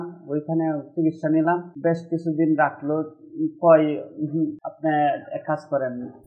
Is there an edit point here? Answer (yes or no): yes